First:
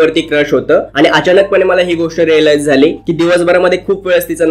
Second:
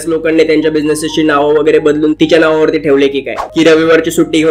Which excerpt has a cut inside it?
second; 1 cut; at 3.5 s

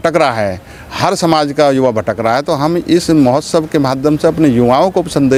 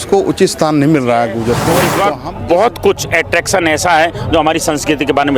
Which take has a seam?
second; 1 cut; at 1.9 s

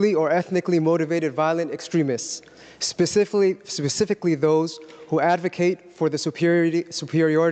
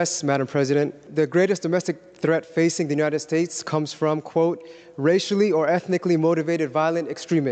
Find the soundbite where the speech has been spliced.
second; 1 cut; at 1.0 s

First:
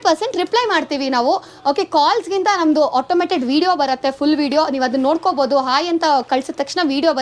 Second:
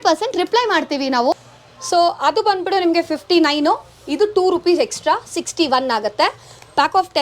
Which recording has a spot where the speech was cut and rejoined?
second; 1 cut; at 1.3 s

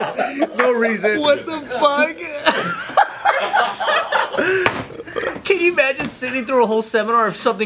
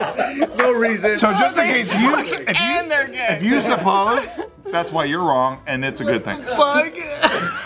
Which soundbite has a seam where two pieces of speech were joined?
first; 2 cuts; at 1.2 s, 4.3 s

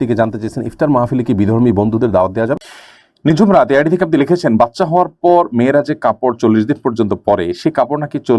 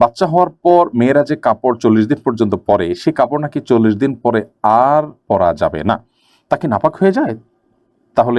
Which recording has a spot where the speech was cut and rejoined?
first; 1 cut; at 2.6 s

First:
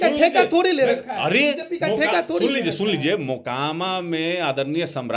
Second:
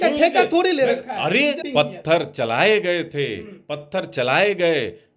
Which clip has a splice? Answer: second; 1 cut; at 1.6 s

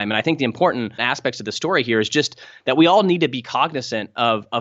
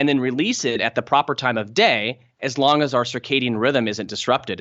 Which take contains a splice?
first; 1 cut; at 1.1 s

